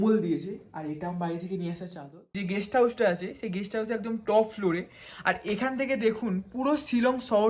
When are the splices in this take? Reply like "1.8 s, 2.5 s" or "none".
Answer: 2.4 s